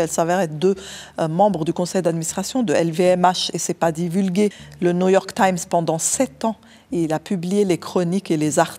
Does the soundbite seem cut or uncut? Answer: cut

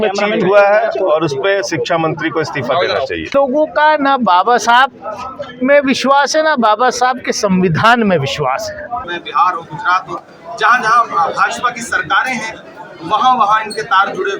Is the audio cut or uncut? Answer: cut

